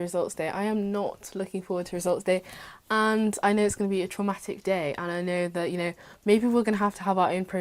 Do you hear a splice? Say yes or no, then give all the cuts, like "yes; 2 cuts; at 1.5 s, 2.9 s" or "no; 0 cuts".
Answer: no; 0 cuts